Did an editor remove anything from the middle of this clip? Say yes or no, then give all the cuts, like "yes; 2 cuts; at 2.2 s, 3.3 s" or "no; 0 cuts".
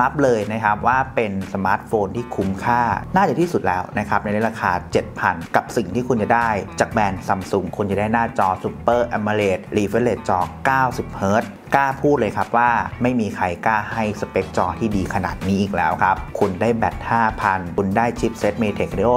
yes; 1 cut; at 9.6 s